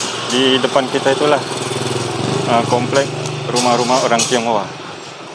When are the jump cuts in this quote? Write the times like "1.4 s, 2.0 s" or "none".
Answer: none

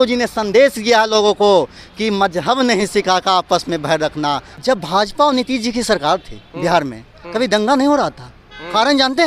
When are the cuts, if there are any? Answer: 4.5 s

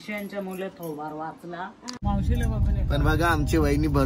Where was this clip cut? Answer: 1.9 s

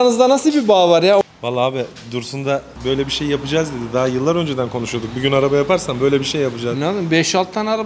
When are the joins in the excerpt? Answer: 1.2 s, 2.7 s

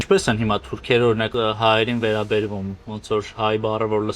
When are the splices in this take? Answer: 1.3 s

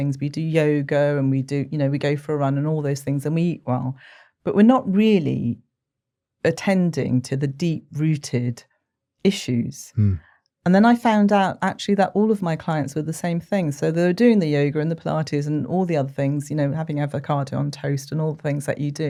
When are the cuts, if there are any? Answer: none

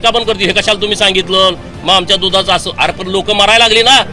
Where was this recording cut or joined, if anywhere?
none

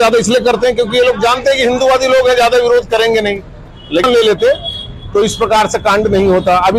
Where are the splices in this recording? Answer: 4.0 s

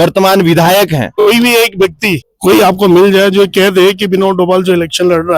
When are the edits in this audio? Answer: 1.1 s, 2.3 s

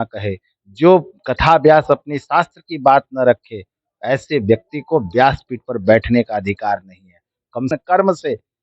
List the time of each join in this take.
7.7 s

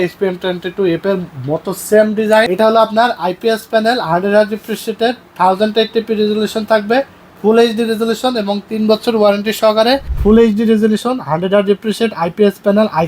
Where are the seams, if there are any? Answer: 2.5 s, 10.1 s

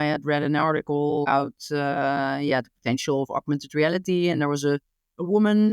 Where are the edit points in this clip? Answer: 1.2 s

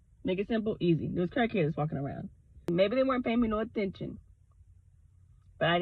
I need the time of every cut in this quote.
2.7 s

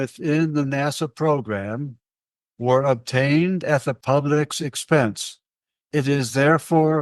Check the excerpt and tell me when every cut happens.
3.9 s

